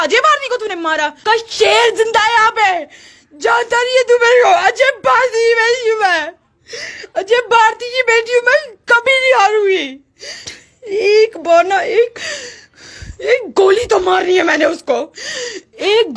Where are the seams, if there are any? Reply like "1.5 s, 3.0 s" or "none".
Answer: 1.2 s, 10.6 s

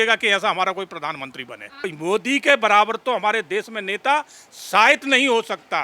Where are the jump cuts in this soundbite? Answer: 1.9 s

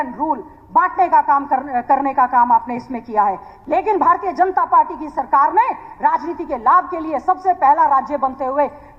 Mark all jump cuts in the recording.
3.5 s

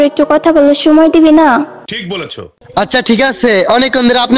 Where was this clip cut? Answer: 2.0 s

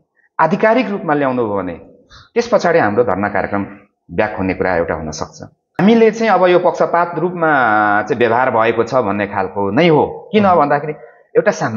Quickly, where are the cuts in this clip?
5.8 s

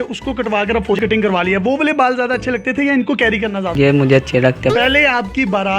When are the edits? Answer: 1.0 s, 4.7 s

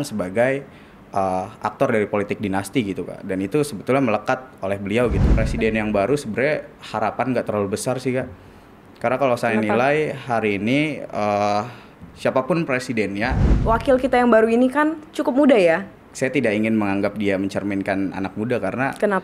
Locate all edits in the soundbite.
5.4 s, 13.5 s, 16.0 s

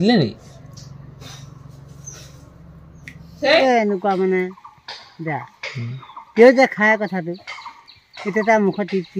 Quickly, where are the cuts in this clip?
3.6 s

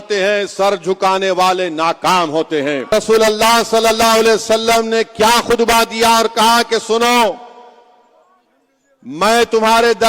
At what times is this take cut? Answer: 2.9 s

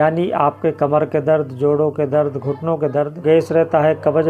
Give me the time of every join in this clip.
3.2 s

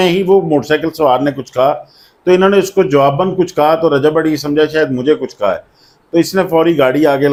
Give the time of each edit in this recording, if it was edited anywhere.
none

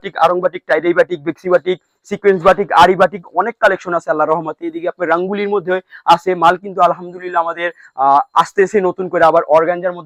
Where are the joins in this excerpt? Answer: none

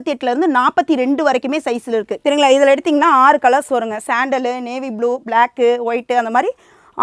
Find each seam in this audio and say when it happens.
2.1 s

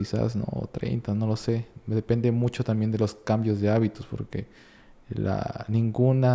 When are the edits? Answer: none

